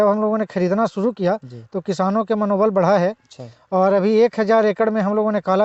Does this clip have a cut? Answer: no; 0 cuts

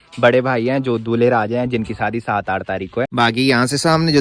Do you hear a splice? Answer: yes; 1 cut; at 3.1 s

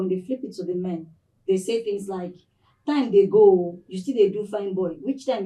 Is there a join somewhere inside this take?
no; 0 cuts

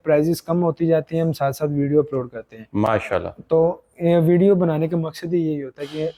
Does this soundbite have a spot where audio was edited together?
no; 0 cuts

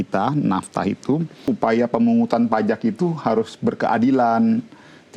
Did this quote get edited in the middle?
yes; 1 cut; at 1.5 s

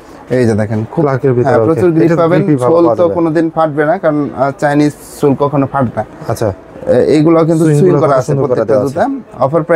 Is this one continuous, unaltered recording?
yes; 0 cuts

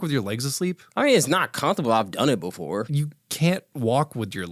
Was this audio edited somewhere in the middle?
yes; 1 cut; at 2.9 s

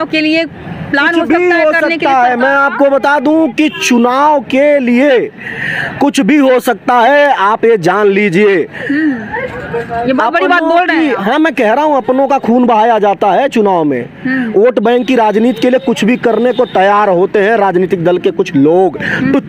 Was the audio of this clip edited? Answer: no; 0 cuts

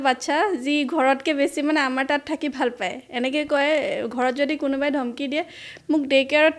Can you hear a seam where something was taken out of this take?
no; 0 cuts

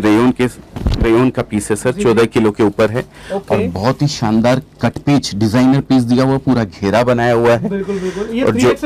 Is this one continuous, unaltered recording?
yes; 0 cuts

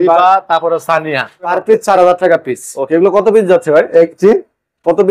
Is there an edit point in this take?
yes; 1 cut; at 1.6 s

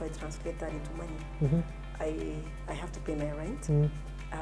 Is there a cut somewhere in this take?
no; 0 cuts

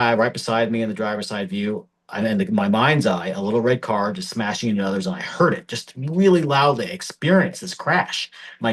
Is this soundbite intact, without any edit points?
yes; 0 cuts

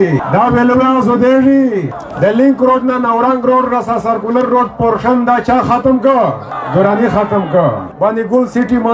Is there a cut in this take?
yes; 2 cuts; at 2.0 s, 7.9 s

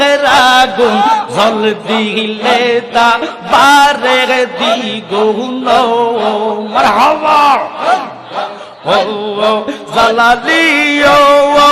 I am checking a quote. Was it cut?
no; 0 cuts

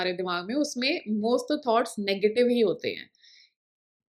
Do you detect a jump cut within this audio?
no; 0 cuts

